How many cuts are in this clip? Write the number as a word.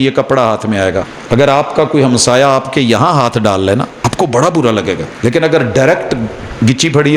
three